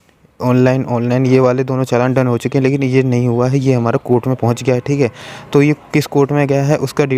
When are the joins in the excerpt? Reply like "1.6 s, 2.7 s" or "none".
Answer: none